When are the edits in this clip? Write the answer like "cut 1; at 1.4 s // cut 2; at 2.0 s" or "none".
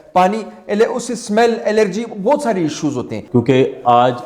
cut 1; at 3.2 s